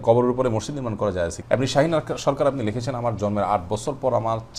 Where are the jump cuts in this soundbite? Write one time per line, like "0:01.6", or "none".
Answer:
0:01.4